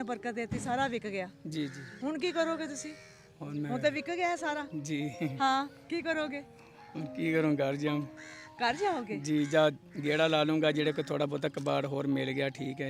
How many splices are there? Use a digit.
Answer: 0